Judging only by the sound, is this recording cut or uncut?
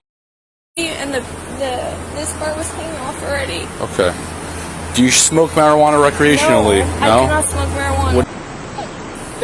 cut